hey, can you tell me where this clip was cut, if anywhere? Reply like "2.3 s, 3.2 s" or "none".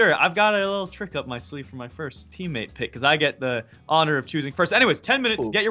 2.1 s